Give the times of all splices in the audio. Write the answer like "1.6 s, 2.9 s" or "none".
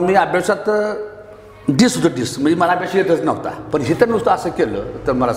3.5 s